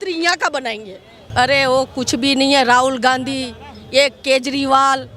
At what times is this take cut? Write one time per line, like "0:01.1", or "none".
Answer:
0:01.1